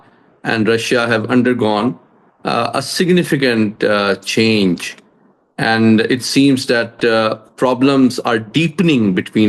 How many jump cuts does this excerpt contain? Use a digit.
0